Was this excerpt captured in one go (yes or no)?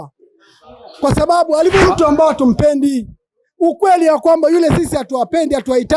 no